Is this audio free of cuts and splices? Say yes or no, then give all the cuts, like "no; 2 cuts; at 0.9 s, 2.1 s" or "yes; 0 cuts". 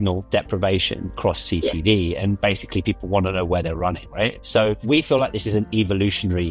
no; 2 cuts; at 1.1 s, 2.4 s